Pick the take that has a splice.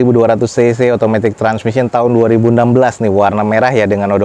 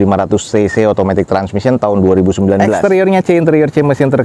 second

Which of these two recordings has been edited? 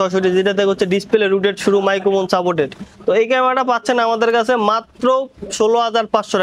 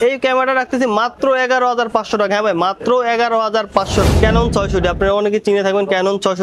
second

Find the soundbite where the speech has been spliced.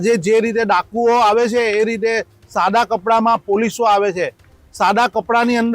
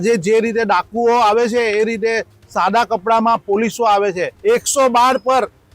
second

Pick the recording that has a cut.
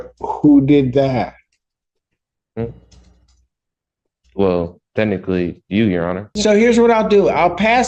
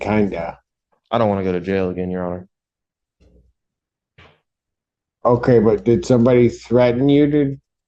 first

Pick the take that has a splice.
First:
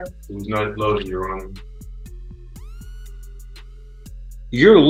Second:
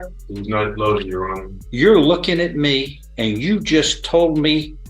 second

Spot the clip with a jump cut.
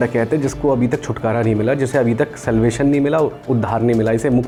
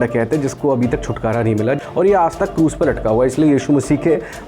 second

